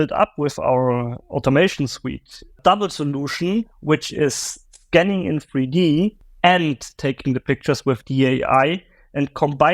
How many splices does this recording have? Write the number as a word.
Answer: two